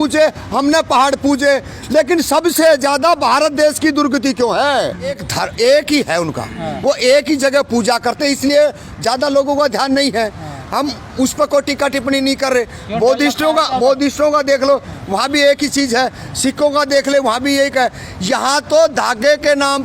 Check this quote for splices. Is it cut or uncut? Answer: cut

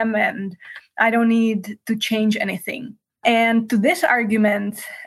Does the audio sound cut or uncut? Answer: cut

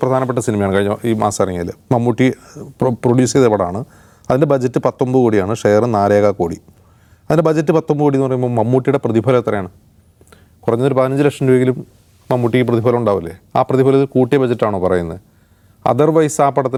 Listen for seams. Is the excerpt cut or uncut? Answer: uncut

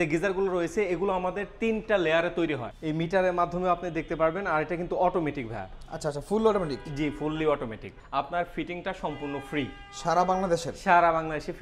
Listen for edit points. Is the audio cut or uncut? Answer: cut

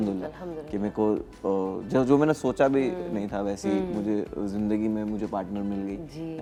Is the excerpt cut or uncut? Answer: uncut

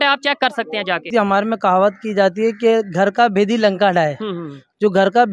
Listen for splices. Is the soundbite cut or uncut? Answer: cut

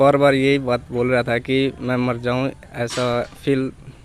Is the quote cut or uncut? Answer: uncut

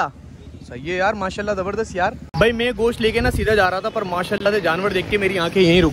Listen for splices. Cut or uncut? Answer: cut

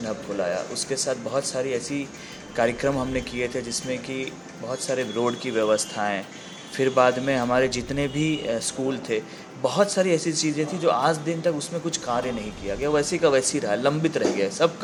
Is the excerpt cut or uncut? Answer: uncut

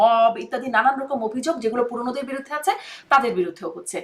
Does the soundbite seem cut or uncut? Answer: uncut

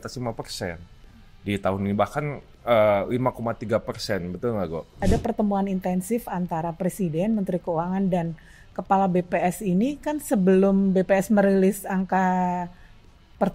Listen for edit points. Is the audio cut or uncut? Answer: cut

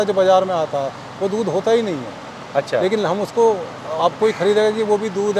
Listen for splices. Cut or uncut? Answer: uncut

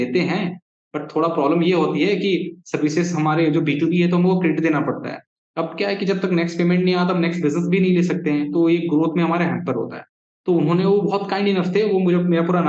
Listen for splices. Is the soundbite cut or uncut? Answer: uncut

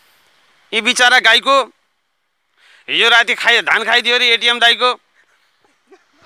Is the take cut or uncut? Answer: uncut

